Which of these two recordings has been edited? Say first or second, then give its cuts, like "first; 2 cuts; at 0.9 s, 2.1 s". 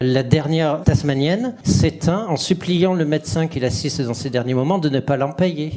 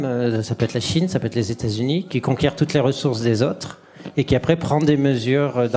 first; 1 cut; at 1.6 s